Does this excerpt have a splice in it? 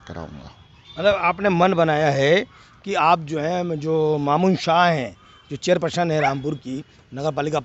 no; 0 cuts

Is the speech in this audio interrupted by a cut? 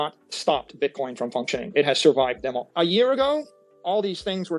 yes; 1 cut; at 2.6 s

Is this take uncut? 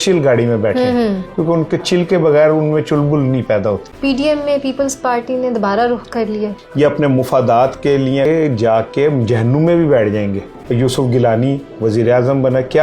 no; 4 cuts; at 3.9 s, 6.6 s, 8.3 s, 10.5 s

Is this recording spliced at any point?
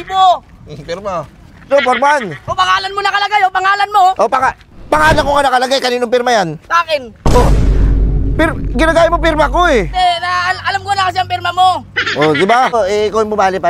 yes; 2 cuts; at 1.7 s, 12.7 s

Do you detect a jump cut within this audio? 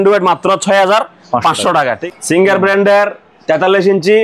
yes; 1 cut; at 2.0 s

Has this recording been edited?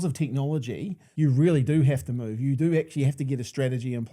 yes; 1 cut; at 1.0 s

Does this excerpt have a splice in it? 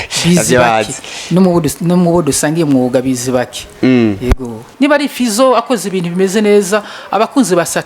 yes; 1 cut; at 4.6 s

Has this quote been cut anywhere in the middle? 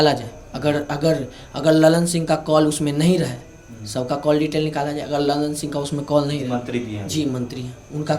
no; 0 cuts

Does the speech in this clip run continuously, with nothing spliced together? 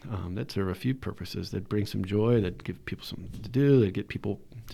yes; 0 cuts

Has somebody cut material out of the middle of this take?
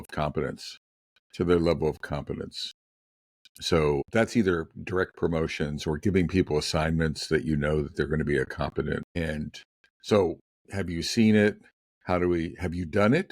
yes; 2 cuts; at 4.1 s, 9.2 s

